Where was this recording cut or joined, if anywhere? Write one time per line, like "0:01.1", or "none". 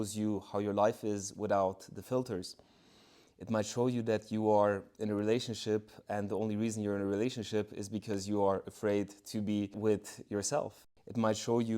0:10.8